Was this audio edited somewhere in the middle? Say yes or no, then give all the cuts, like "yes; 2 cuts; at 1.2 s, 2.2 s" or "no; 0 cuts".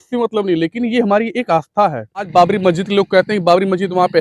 yes; 1 cut; at 2.3 s